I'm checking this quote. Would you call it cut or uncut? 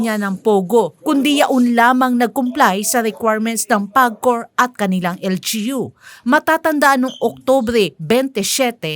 uncut